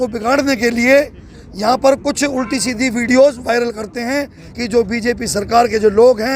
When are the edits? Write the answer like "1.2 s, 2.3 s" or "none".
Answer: 4.4 s